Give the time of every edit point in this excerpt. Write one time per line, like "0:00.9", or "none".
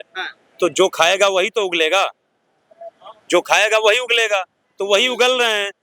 none